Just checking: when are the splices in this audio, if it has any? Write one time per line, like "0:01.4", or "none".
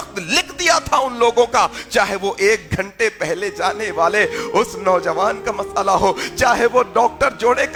none